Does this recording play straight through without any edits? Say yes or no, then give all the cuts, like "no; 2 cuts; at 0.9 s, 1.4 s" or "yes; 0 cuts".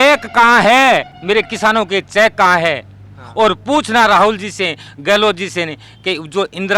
yes; 0 cuts